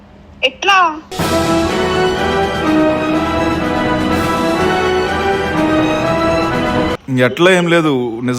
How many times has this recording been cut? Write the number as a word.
one